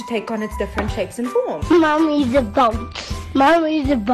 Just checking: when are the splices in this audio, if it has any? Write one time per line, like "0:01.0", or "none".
0:01.6